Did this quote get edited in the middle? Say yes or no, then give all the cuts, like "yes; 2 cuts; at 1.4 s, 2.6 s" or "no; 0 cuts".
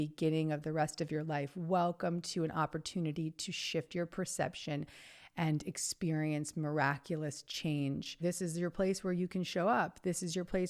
yes; 1 cut; at 8.1 s